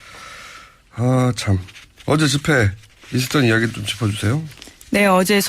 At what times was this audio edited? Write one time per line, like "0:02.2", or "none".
0:04.4